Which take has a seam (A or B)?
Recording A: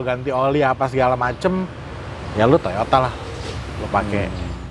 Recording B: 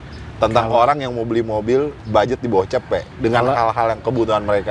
B